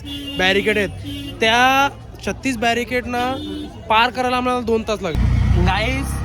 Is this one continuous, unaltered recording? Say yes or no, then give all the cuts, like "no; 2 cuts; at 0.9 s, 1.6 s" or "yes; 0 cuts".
no; 1 cut; at 5.1 s